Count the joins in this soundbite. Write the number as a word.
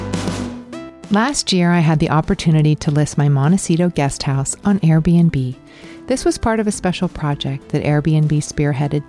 one